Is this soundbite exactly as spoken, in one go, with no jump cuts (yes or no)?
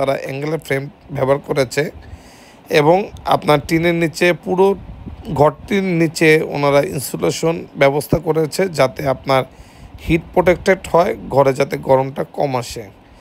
yes